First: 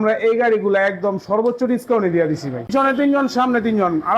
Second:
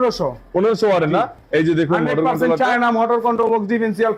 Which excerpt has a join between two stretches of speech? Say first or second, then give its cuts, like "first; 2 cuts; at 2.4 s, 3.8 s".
first; 1 cut; at 2.7 s